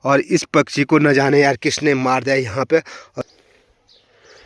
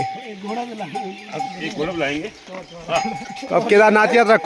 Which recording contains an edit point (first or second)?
first